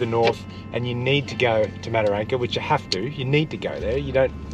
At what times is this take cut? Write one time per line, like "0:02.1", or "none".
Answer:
none

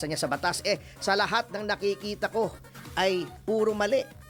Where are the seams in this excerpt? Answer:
none

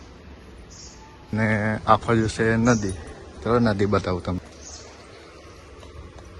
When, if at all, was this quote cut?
0:01.3
0:04.4

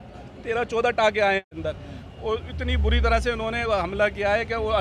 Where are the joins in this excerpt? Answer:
0:01.6

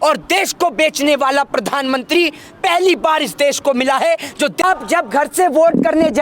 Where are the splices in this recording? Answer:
0:04.6

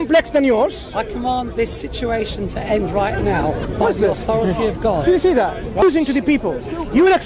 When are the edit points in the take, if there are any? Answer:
0:05.8

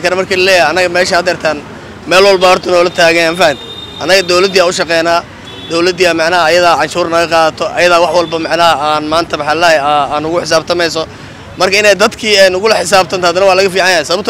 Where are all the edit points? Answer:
none

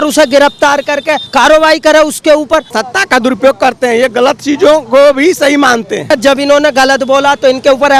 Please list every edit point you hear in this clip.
0:01.2
0:02.8
0:06.1

